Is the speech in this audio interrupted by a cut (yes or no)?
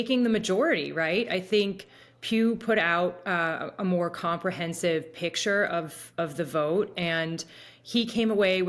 no